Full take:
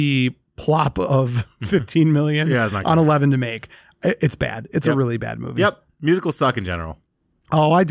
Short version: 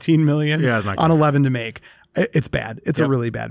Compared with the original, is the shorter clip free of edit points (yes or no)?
yes